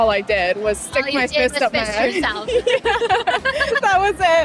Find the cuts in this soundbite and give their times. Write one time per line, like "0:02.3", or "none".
none